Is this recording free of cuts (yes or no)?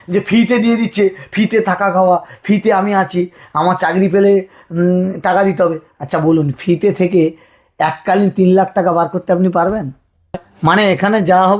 no